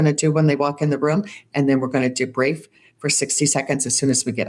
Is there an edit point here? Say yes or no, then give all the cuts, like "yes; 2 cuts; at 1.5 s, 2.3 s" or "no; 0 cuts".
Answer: no; 0 cuts